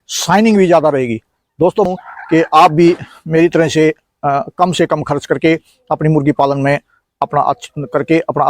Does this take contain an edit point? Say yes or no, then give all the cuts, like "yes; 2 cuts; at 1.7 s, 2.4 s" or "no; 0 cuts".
yes; 1 cut; at 1.9 s